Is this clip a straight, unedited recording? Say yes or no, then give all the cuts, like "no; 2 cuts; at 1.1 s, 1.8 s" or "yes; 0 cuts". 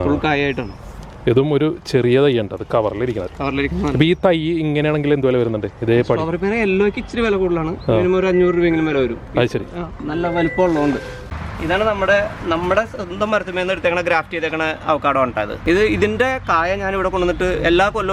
no; 2 cuts; at 11.1 s, 15.5 s